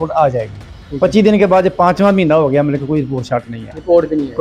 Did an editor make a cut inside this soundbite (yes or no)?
no